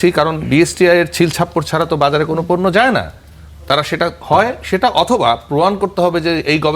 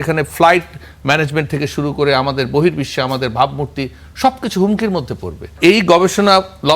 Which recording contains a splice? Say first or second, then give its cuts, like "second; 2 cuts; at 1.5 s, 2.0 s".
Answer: second; 1 cut; at 5.5 s